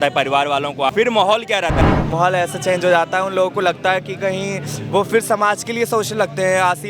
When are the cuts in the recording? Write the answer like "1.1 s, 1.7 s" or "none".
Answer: 0.9 s, 1.8 s